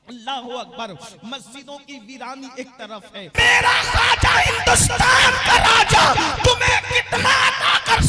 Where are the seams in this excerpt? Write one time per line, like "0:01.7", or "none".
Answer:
0:03.3